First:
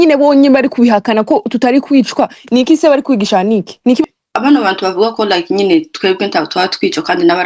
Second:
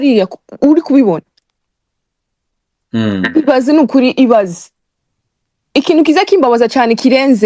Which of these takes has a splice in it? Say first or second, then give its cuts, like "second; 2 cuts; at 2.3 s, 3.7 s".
first; 1 cut; at 4.0 s